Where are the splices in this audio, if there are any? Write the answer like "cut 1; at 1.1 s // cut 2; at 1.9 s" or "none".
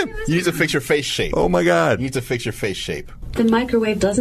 cut 1; at 3.3 s